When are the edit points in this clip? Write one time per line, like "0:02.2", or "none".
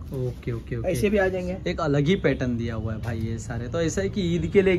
none